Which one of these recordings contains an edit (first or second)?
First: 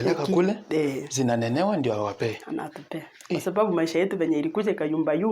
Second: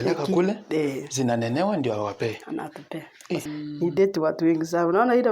second